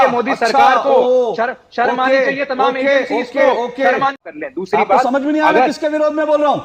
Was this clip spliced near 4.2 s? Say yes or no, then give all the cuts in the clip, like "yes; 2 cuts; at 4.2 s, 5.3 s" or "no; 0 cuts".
yes; 1 cut; at 4.2 s